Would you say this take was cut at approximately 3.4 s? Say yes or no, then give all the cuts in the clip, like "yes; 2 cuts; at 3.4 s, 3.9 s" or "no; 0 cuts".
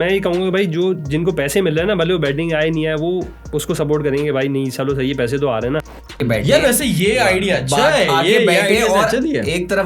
no; 1 cut; at 6.1 s